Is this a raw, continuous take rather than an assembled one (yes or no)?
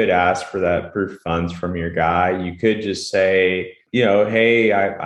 no